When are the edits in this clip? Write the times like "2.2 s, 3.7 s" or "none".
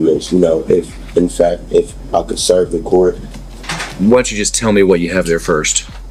none